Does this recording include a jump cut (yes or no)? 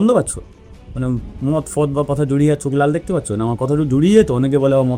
no